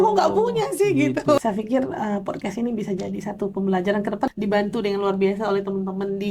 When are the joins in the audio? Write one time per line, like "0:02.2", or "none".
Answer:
0:01.4
0:04.3